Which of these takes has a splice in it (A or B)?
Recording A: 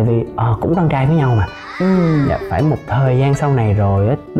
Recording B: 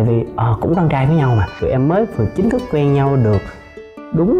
B